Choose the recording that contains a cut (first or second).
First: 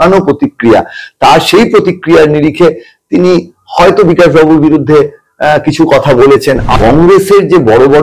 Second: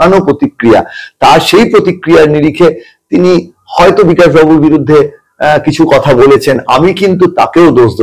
first